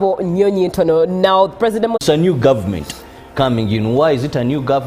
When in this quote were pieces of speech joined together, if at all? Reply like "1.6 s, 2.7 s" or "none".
2.0 s

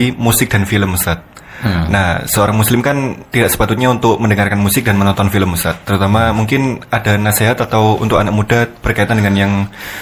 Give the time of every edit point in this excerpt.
none

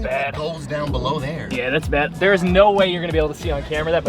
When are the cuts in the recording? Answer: 2.1 s

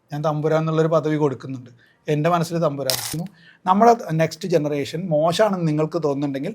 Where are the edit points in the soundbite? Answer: 3.3 s

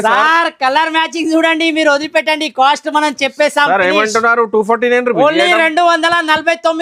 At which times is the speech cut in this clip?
none

